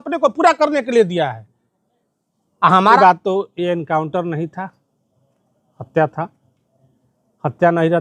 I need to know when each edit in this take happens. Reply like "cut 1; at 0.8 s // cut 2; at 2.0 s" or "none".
cut 1; at 3.0 s